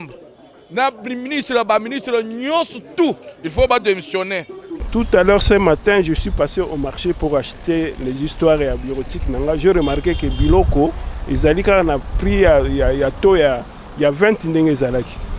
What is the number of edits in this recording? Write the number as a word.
one